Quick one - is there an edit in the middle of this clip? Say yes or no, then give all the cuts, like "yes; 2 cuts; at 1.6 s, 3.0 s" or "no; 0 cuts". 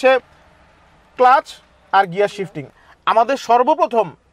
yes; 1 cut; at 2.8 s